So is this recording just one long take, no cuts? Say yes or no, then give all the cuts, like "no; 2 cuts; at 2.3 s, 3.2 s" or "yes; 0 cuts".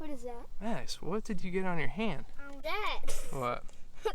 no; 1 cut; at 2.6 s